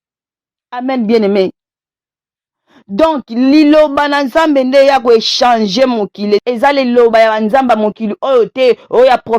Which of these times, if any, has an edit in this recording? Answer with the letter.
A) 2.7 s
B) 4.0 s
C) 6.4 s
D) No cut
C